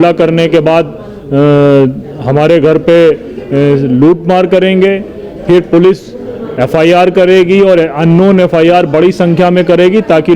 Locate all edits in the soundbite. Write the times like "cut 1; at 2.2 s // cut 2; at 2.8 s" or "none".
none